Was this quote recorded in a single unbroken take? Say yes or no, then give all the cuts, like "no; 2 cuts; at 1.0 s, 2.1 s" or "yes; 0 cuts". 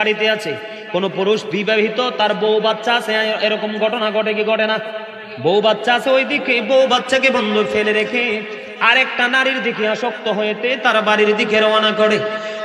yes; 0 cuts